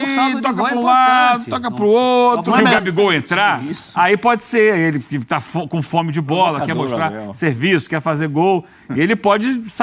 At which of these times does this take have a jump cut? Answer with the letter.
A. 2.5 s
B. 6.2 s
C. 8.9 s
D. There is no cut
A